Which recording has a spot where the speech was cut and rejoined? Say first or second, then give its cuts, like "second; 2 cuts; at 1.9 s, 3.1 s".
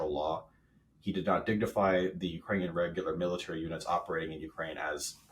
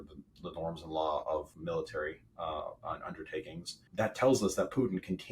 second; 2 cuts; at 1.5 s, 3.8 s